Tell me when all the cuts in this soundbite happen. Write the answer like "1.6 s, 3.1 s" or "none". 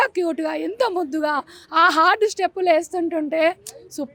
none

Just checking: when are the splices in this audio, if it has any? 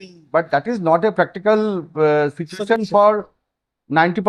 1.5 s

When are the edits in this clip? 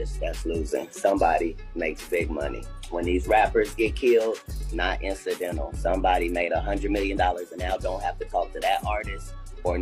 none

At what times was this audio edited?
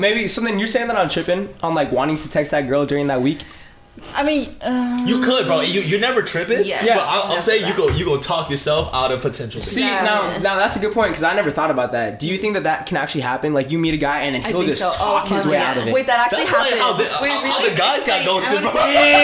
none

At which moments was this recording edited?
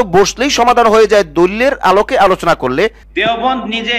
3.0 s

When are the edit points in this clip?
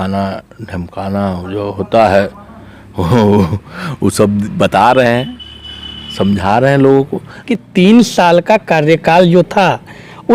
7.4 s

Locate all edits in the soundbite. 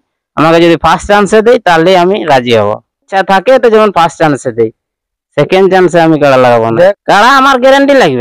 3.1 s, 7.0 s

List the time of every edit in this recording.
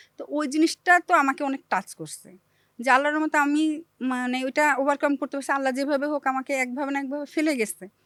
none

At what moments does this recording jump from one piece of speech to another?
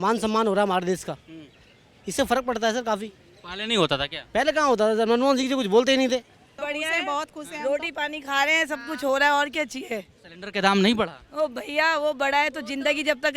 6.6 s

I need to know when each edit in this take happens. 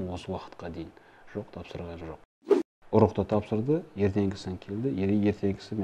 2.3 s

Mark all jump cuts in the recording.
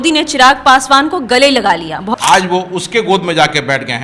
2.1 s

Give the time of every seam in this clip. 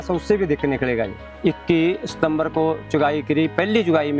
1.2 s

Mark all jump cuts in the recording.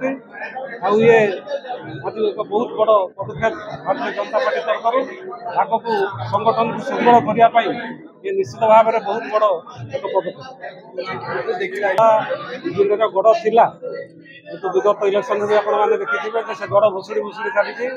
none

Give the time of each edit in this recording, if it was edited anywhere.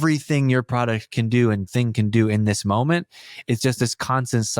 none

